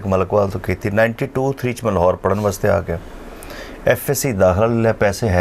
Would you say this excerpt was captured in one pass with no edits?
yes; 0 cuts

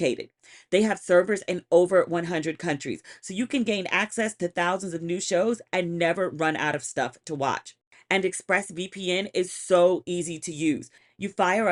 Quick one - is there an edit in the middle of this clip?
no; 0 cuts

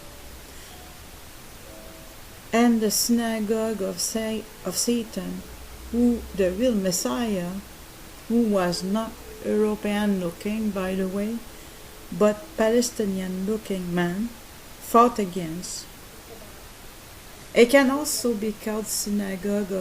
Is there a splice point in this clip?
yes; 1 cut; at 4.5 s

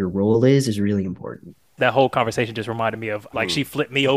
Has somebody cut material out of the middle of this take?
yes; 2 cuts; at 1.8 s, 3.3 s

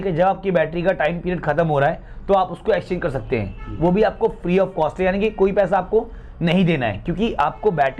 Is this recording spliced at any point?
no; 0 cuts

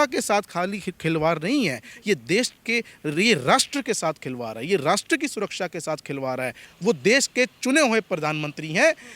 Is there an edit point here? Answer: yes; 1 cut; at 6.7 s

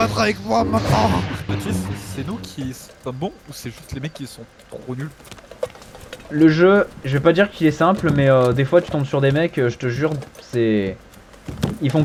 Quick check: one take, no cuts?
yes; 0 cuts

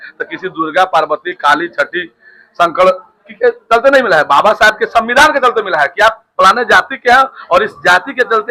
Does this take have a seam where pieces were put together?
no; 0 cuts

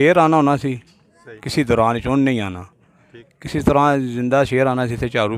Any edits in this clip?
no; 0 cuts

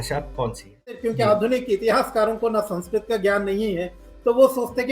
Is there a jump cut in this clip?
yes; 1 cut; at 1.0 s

